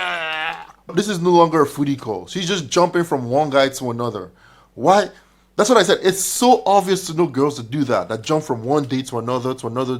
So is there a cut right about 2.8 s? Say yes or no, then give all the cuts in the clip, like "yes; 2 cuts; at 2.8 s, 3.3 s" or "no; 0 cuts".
no; 1 cut; at 0.9 s